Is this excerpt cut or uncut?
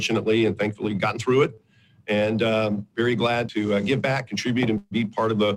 cut